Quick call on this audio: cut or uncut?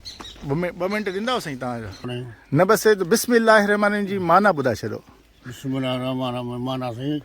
cut